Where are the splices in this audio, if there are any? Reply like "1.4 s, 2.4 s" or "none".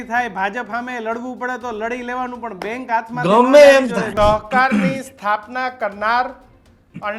4.1 s